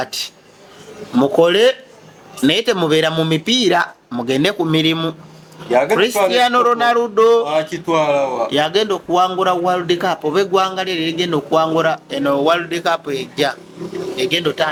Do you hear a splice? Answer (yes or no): no